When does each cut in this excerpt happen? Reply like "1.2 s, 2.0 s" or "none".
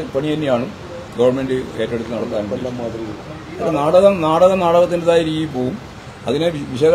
3.4 s